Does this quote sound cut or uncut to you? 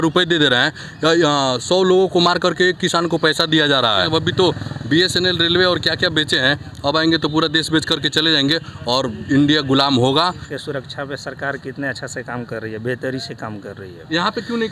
cut